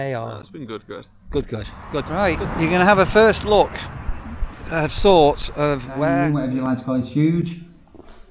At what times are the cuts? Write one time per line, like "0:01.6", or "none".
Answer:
0:02.1
0:06.1